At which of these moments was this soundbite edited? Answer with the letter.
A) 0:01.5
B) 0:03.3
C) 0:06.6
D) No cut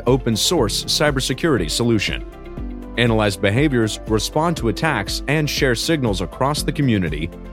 D